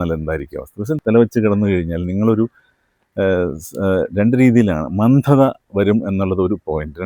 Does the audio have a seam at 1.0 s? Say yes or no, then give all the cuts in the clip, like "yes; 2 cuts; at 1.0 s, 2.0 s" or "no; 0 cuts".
yes; 1 cut; at 1.0 s